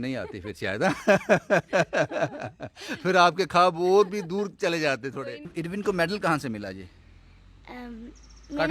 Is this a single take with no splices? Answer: no; 1 cut; at 5.5 s

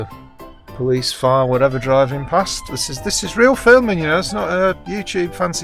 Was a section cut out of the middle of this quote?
no; 0 cuts

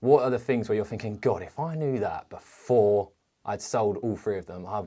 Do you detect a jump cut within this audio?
no; 0 cuts

